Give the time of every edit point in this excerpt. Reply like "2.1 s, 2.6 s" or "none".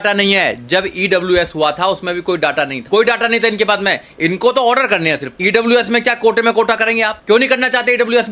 2.8 s, 5.3 s, 7.2 s